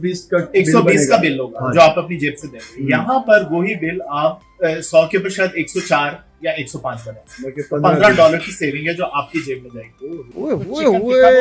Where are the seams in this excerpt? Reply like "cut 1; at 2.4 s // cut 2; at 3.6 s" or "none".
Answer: cut 1; at 4.5 s // cut 2; at 10.2 s